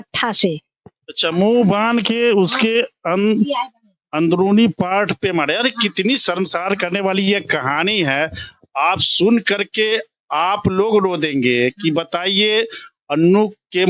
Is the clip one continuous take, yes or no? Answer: yes